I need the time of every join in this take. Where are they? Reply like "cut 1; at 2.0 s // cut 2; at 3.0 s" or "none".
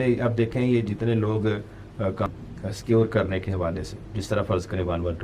cut 1; at 2.3 s